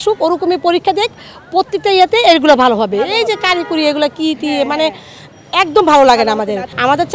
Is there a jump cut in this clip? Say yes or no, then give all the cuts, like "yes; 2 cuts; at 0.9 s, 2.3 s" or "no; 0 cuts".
no; 0 cuts